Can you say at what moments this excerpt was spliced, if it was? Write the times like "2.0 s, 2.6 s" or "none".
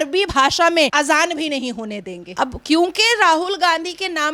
2.4 s